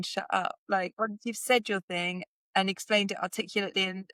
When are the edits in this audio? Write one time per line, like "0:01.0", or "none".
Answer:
none